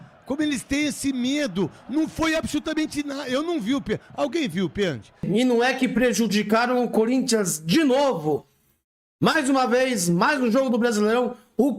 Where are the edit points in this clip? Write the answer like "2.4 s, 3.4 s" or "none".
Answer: 5.1 s